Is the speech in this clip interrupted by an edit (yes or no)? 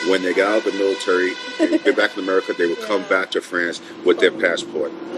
no